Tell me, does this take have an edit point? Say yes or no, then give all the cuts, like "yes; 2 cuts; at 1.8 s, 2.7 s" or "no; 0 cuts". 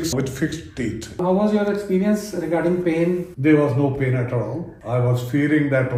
no; 0 cuts